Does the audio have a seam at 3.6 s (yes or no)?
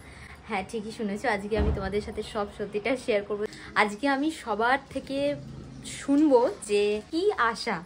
yes